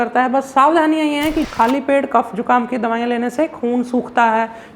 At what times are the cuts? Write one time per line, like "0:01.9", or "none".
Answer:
0:01.4